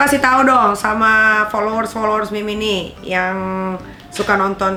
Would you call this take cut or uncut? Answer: uncut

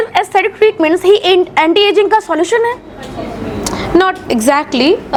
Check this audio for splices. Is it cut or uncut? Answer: uncut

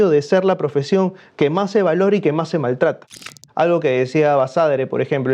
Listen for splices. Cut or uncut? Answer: cut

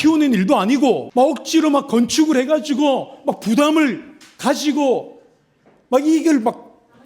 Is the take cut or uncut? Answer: cut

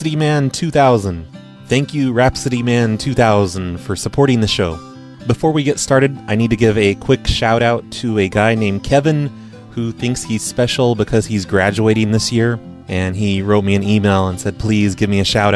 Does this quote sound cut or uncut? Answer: cut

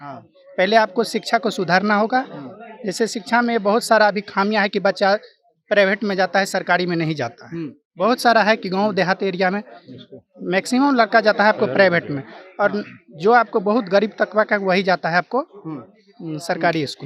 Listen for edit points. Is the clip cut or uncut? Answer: uncut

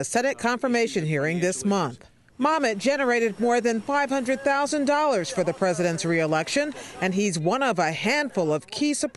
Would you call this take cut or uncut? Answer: cut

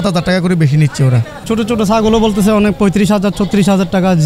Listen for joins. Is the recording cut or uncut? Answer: cut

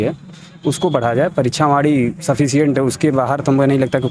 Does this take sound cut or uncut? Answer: uncut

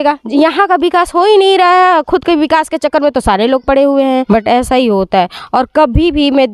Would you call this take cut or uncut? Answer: cut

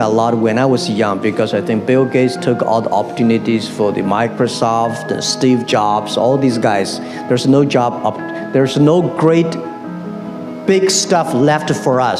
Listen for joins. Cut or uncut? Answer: uncut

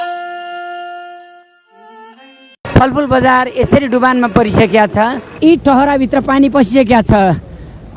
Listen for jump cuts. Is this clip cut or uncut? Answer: cut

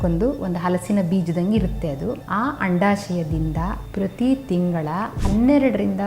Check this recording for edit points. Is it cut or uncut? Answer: cut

